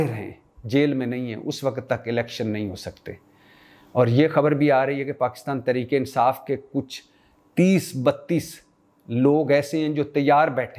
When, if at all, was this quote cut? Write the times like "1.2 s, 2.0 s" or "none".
none